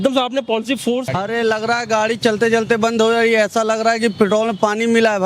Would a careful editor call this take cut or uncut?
cut